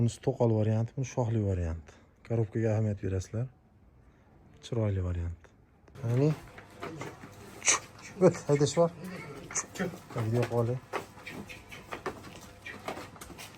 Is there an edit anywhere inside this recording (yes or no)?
yes